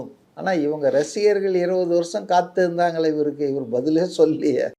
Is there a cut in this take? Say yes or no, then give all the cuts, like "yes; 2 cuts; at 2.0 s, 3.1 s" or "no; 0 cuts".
no; 0 cuts